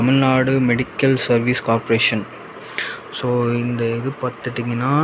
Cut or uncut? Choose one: uncut